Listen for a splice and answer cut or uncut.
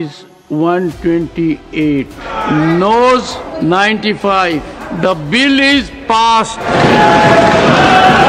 cut